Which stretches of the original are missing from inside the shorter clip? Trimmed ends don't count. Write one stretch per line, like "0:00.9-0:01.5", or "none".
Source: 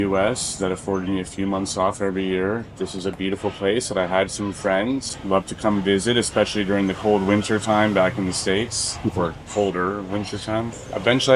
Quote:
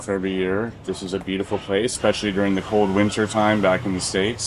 0:03.9-0:06.3